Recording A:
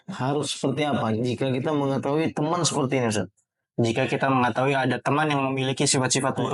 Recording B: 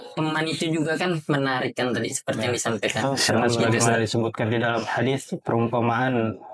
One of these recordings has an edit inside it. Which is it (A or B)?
B